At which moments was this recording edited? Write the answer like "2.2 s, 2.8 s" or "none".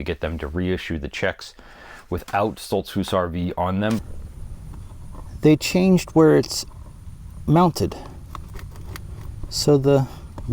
4.0 s